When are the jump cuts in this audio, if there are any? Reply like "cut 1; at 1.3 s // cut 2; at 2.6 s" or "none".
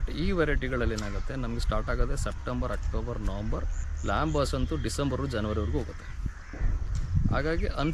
none

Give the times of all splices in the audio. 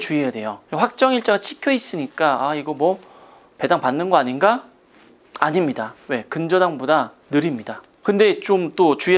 none

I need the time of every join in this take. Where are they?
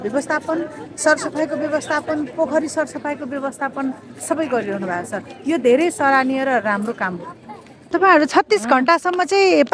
cut 1; at 7.9 s

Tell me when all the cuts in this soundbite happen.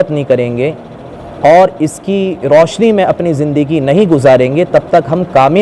none

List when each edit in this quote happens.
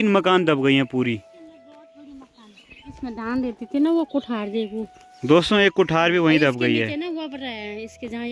none

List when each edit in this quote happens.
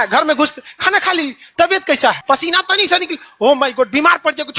cut 1; at 2.2 s

